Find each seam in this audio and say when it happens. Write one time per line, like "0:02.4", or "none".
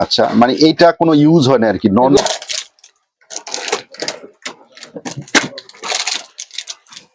0:02.2